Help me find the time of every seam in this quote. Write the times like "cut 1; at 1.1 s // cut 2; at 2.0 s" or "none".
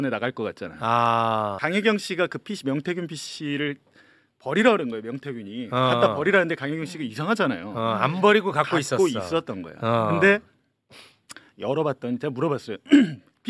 none